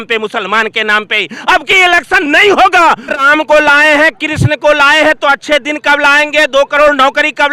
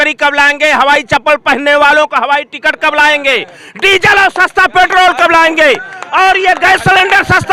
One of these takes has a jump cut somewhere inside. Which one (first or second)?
first